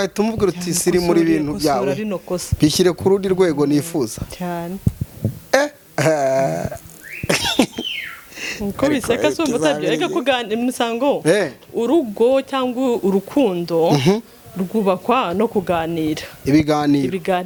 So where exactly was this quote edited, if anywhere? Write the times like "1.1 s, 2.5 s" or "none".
none

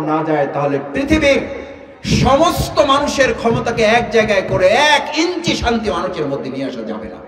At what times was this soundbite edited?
none

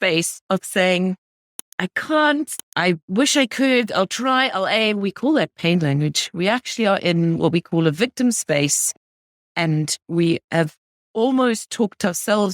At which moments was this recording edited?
2.6 s

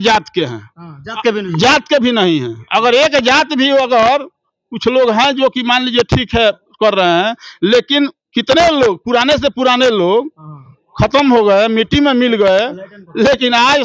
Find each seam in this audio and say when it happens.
none

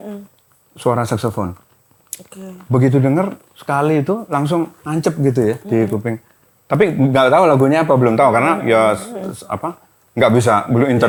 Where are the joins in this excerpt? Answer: none

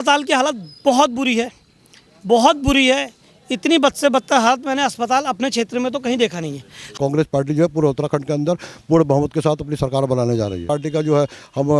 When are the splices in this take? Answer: 6.9 s, 10.6 s

